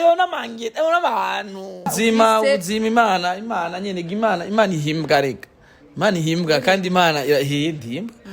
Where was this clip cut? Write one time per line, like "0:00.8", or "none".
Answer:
0:01.9